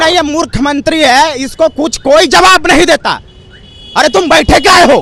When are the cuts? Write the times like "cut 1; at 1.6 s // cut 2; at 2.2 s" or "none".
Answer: none